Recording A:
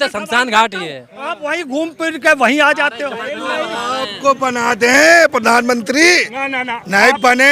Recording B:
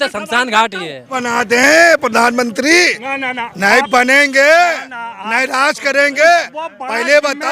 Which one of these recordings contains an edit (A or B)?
B